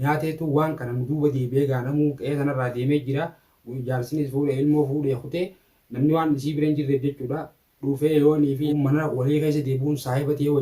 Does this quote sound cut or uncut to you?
cut